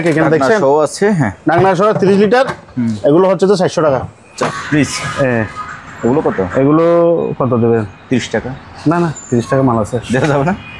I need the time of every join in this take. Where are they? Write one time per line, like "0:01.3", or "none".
0:04.6